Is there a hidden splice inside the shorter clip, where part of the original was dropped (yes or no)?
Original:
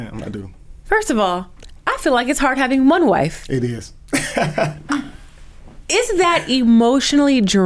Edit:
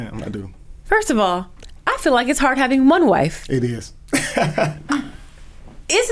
no